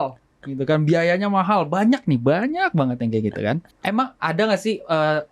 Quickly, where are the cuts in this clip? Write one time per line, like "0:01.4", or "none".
0:03.7

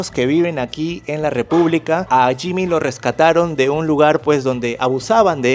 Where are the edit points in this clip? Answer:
none

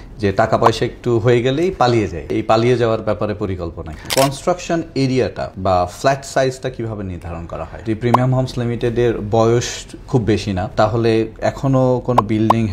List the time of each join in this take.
0:02.4
0:04.0
0:05.5
0:07.8
0:10.7

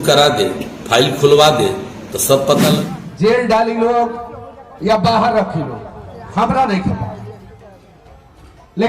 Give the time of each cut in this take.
0:02.7

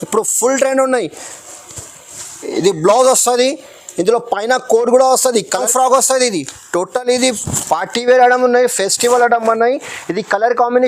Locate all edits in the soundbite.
0:05.6

